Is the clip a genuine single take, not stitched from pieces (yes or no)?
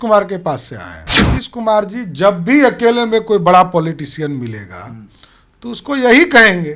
yes